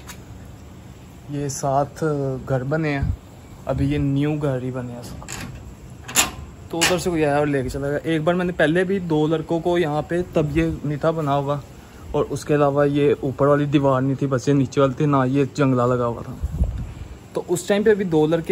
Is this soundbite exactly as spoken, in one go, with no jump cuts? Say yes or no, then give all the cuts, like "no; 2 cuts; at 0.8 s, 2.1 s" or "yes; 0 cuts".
yes; 0 cuts